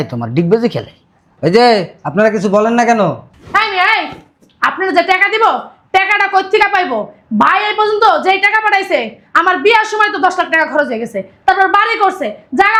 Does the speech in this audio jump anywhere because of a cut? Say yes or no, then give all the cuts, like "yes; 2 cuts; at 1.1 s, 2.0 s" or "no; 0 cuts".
no; 0 cuts